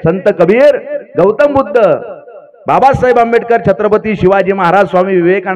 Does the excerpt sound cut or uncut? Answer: uncut